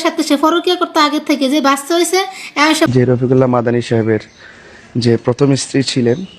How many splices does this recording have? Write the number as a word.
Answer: one